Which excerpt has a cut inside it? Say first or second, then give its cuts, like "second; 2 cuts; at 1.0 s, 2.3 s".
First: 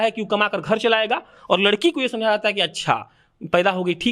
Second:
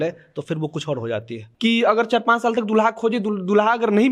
second; 1 cut; at 1.4 s